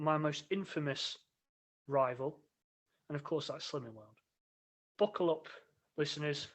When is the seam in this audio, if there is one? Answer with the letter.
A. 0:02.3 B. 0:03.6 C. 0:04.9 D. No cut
C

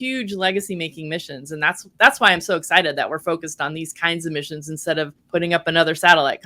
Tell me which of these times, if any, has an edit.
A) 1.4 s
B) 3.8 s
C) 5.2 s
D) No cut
C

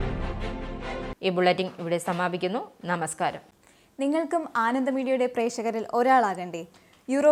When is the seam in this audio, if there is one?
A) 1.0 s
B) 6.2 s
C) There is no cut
C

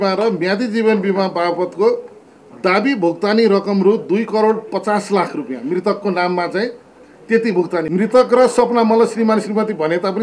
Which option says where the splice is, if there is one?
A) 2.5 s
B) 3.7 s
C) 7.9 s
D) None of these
C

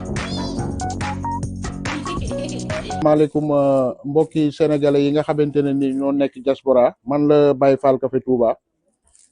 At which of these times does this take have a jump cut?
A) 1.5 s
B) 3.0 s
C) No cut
B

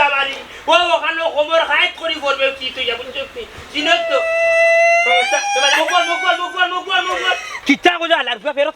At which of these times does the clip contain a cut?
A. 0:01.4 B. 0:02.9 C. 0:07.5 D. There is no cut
C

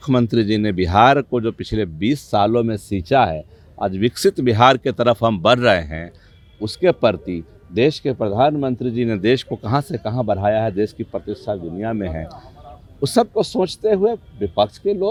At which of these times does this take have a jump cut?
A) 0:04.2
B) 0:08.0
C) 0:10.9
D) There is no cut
D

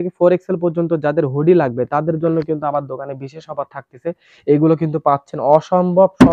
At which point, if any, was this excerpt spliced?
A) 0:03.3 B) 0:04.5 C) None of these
C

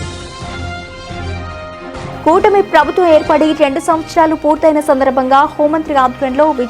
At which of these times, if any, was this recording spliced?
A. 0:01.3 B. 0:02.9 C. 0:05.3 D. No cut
A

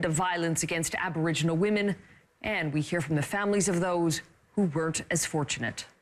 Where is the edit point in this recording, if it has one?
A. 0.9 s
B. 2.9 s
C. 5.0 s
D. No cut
B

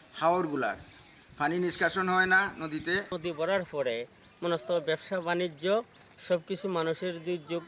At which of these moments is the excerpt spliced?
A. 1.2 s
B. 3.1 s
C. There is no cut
B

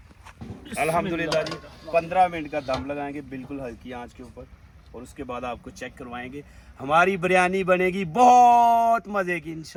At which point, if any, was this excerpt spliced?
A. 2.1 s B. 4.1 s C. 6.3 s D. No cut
D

